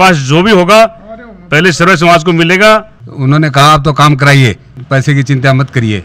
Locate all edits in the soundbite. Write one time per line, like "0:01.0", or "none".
0:03.0

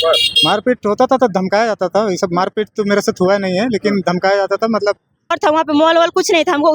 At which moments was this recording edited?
0:05.4

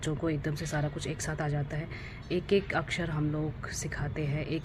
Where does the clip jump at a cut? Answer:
none

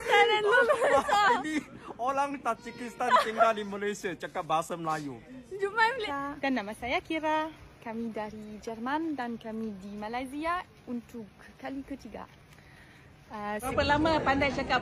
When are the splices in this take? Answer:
0:06.1
0:13.7

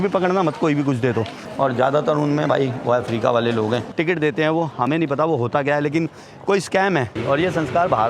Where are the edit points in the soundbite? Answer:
0:01.4
0:03.9
0:07.1

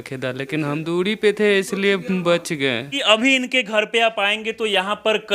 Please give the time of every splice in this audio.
0:00.8
0:03.0

